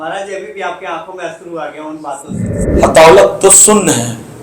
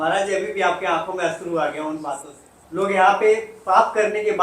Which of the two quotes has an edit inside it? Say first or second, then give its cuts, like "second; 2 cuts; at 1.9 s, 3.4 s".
first; 1 cut; at 2.6 s